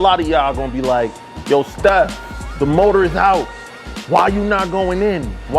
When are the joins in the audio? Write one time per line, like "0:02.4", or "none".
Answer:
none